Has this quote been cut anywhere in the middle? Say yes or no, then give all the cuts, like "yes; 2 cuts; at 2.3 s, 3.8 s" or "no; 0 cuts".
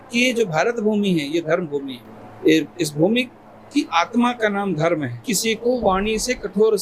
yes; 1 cut; at 5.3 s